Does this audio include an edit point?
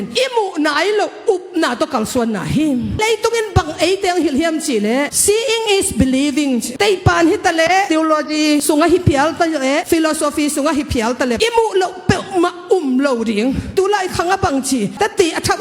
yes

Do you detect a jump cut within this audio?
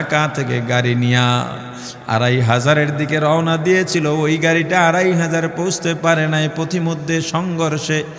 no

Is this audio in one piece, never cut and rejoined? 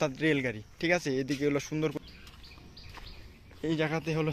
no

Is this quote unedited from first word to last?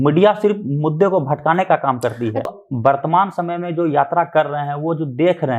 no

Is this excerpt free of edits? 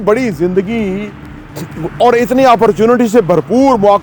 yes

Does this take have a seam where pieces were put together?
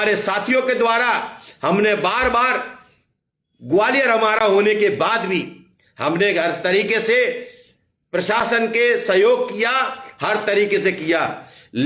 no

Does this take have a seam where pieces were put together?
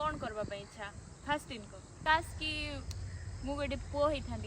yes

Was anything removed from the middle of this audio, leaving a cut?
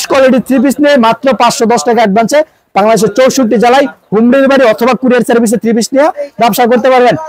no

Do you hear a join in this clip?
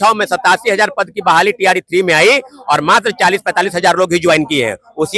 no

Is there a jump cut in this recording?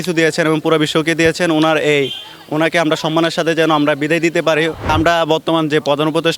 yes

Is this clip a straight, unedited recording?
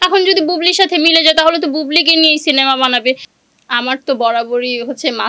no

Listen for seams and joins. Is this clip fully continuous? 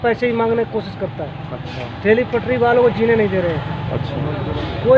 yes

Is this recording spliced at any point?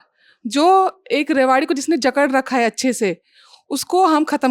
no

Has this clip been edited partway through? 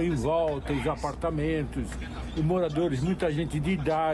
no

